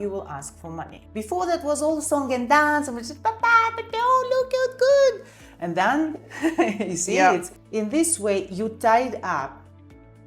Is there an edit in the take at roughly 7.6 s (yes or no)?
yes